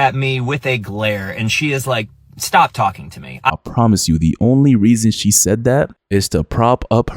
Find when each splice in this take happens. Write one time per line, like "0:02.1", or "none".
0:03.5
0:06.0